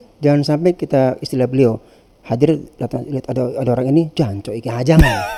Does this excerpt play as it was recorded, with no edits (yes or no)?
yes